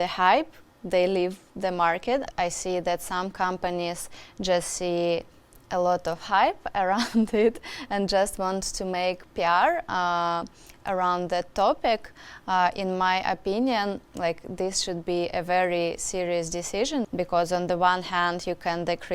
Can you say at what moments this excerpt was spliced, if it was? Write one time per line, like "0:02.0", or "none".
0:02.3
0:17.1

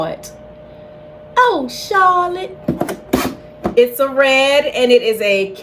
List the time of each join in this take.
none

